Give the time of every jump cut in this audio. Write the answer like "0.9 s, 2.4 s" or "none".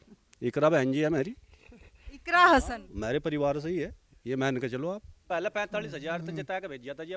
5.3 s